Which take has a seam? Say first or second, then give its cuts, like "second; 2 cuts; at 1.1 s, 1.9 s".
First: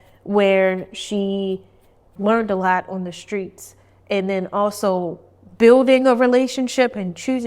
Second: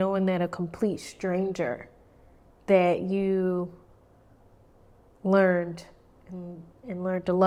first; 1 cut; at 2.1 s